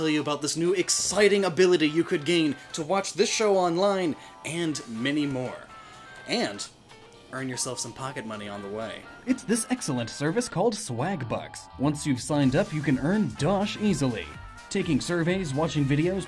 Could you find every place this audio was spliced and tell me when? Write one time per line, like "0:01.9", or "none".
0:11.5